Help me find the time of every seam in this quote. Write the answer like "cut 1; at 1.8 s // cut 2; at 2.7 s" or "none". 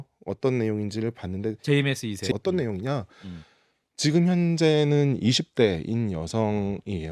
cut 1; at 2.3 s